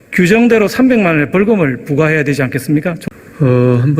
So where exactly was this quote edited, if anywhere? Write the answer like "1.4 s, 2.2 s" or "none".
3.0 s